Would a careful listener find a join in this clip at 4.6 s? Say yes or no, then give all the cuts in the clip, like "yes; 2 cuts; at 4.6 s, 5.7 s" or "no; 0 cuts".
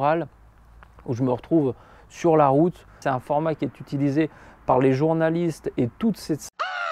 no; 1 cut; at 3.0 s